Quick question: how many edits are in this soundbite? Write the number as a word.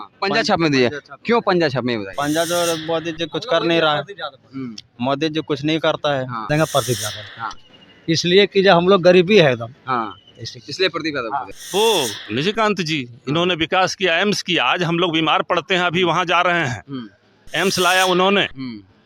two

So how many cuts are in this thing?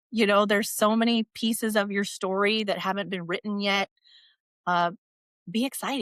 zero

